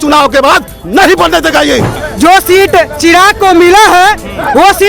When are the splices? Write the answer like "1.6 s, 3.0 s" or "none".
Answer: 1.9 s